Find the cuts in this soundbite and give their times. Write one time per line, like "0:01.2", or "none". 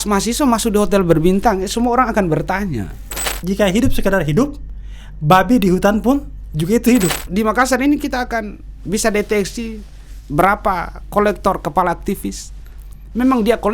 0:03.4
0:07.2